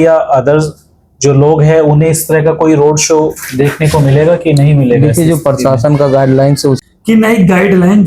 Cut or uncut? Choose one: cut